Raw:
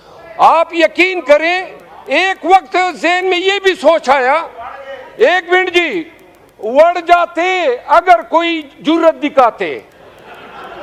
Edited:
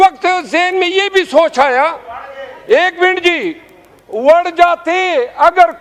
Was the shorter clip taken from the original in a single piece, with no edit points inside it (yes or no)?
yes